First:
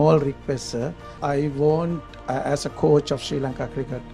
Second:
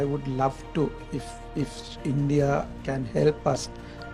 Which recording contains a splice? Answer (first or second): first